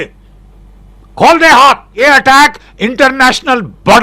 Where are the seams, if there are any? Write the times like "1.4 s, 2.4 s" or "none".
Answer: 2.0 s